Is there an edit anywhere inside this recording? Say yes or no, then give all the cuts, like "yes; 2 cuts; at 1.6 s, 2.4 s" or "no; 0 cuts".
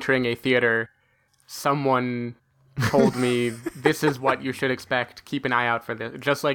no; 0 cuts